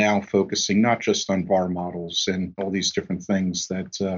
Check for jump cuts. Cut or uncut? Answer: cut